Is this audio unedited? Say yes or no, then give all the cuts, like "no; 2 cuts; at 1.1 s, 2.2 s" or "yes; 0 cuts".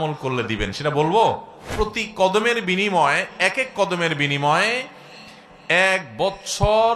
no; 1 cut; at 1.6 s